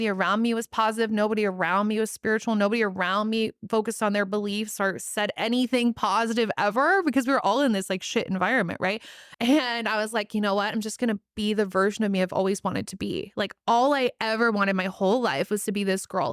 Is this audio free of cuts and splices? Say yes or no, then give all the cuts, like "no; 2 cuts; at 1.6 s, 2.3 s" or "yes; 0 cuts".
no; 1 cut; at 9.2 s